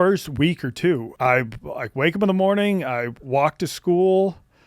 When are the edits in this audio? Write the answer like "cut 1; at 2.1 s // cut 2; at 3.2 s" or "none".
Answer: cut 1; at 1.1 s